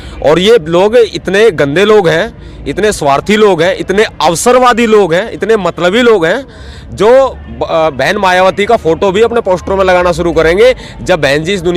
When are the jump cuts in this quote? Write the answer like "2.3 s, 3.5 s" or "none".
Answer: none